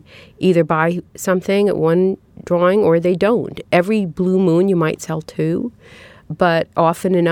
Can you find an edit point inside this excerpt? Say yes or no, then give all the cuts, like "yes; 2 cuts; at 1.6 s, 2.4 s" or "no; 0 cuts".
no; 0 cuts